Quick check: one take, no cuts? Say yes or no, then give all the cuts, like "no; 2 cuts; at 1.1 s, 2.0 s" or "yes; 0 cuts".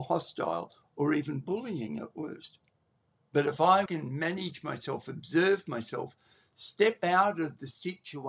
no; 1 cut; at 3.9 s